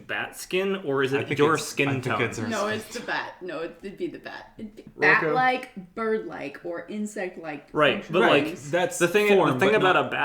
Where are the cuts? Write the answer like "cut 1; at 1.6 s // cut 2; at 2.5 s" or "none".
cut 1; at 4.8 s